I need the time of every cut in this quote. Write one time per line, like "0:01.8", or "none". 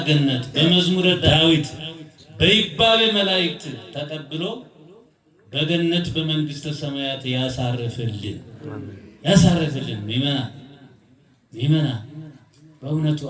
0:01.2